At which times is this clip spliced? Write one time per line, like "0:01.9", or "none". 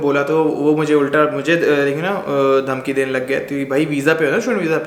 none